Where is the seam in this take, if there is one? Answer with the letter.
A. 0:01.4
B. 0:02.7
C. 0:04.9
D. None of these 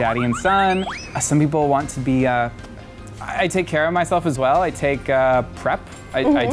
D